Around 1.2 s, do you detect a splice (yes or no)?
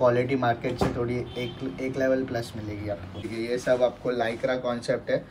no